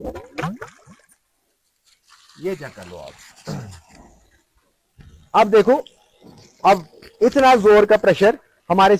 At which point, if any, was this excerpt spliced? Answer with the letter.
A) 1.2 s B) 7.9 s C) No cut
A